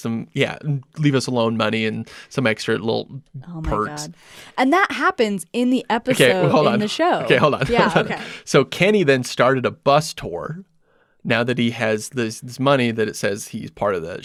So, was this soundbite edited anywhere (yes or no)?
no